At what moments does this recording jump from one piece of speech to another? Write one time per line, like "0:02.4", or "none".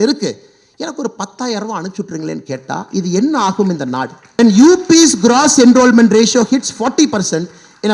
0:04.4